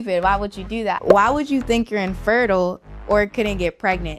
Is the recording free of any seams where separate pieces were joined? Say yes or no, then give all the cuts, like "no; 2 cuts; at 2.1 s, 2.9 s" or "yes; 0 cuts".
no; 1 cut; at 1.1 s